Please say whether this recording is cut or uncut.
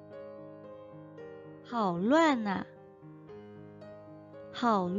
cut